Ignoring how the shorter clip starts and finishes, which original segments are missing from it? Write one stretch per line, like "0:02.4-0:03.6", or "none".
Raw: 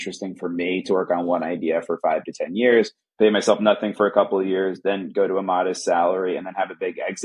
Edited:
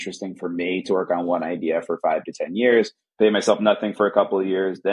none